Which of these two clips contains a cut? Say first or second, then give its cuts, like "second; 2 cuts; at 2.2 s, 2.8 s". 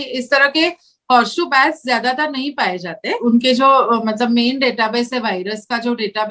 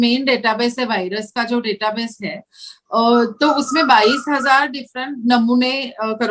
first; 1 cut; at 3.1 s